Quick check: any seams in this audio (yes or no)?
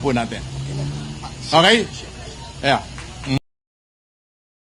no